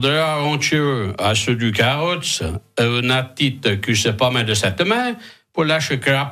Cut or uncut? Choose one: uncut